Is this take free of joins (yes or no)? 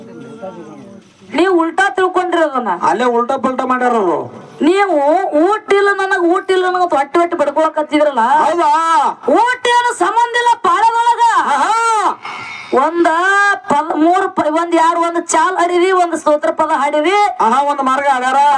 yes